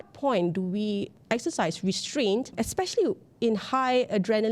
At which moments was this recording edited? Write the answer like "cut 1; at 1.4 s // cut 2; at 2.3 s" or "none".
cut 1; at 1.1 s // cut 2; at 2.5 s